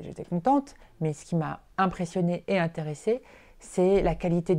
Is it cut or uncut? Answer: cut